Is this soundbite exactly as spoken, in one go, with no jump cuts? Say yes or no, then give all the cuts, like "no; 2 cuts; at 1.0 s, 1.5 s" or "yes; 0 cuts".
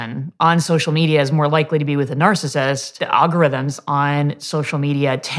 no; 1 cut; at 3.0 s